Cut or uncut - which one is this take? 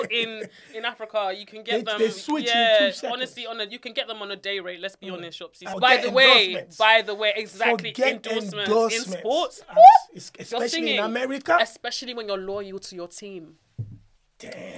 cut